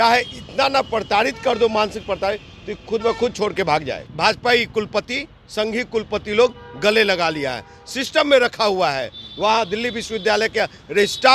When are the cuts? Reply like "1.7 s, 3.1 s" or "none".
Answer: 4.1 s